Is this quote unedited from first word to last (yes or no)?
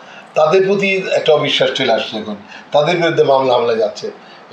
yes